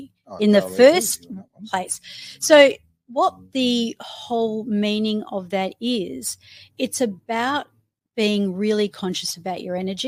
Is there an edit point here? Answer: no; 0 cuts

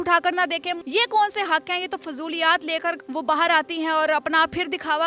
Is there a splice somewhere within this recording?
yes; 2 cuts; at 0.8 s, 3.0 s

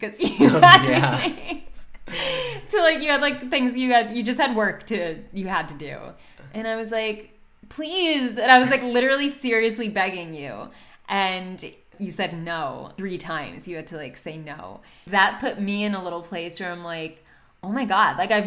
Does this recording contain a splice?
yes; 3 cuts; at 11.9 s, 12.9 s, 15.0 s

